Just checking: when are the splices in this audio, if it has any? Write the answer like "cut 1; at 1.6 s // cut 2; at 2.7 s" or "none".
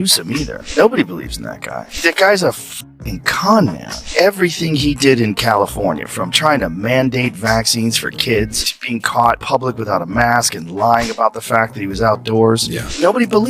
none

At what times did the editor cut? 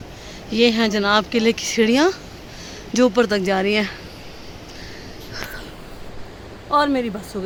none

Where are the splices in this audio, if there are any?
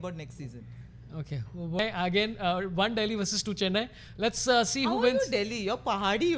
cut 1; at 1.8 s

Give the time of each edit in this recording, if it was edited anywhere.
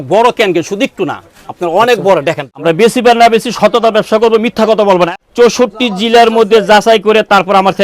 cut 1; at 2.4 s // cut 2; at 5.1 s

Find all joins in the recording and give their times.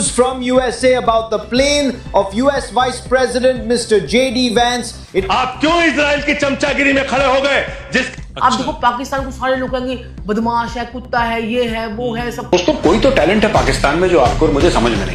cut 1; at 5.2 s // cut 2; at 8.1 s // cut 3; at 12.4 s

